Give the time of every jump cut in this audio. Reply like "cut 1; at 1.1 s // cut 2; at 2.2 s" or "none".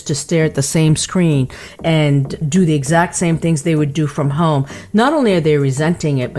cut 1; at 2.4 s